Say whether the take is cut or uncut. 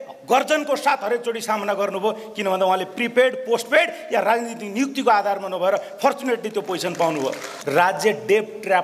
cut